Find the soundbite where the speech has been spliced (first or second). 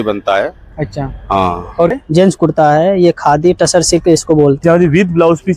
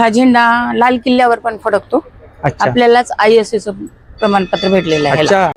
first